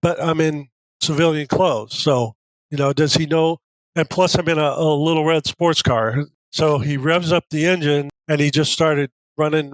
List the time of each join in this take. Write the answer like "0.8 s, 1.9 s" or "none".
6.3 s, 8.1 s